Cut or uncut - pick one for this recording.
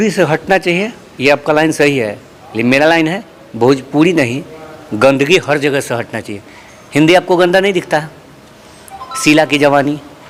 uncut